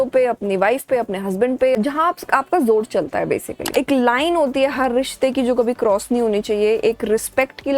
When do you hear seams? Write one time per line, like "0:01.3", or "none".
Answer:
0:01.8
0:03.6